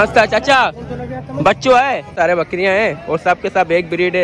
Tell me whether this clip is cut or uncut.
cut